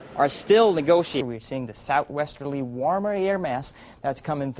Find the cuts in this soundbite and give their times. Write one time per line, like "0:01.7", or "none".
0:01.2